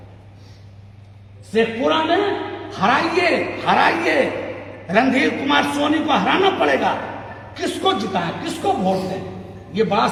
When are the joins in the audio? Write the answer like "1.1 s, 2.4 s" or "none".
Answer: none